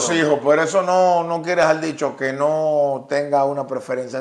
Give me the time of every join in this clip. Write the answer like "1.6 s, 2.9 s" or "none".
none